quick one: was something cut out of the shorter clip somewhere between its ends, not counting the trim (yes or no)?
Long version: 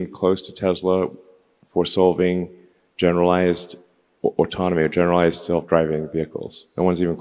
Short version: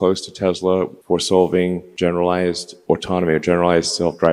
yes